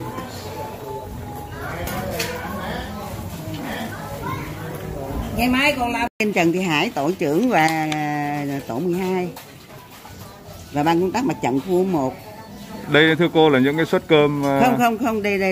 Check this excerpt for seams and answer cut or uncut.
cut